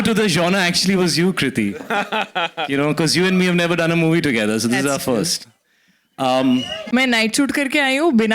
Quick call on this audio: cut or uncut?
cut